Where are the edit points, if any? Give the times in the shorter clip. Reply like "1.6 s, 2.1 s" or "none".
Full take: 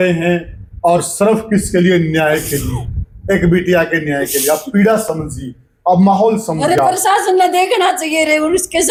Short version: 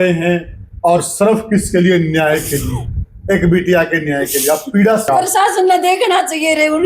5.1 s